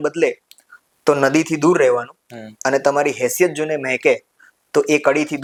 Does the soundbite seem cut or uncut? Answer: uncut